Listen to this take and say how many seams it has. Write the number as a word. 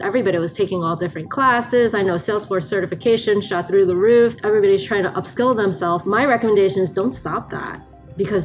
one